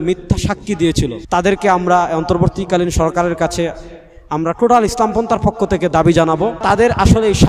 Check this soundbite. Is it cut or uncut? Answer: cut